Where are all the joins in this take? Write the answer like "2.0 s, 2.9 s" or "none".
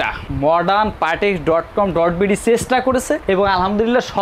none